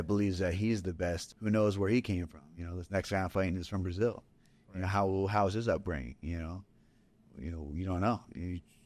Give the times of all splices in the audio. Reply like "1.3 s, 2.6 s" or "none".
1.3 s